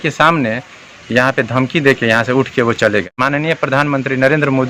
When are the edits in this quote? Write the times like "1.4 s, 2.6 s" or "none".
3.1 s